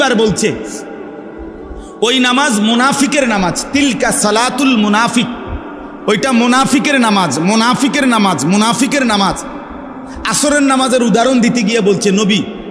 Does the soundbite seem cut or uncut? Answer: uncut